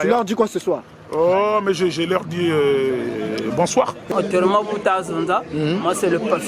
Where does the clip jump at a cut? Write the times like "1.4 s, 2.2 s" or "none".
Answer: 4.1 s